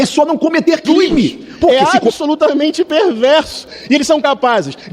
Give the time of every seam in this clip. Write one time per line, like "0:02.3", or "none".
0:01.7